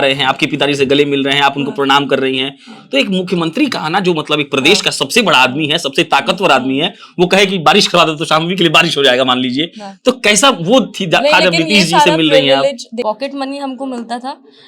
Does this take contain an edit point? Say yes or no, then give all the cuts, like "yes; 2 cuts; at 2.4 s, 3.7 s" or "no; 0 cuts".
yes; 1 cut; at 13.0 s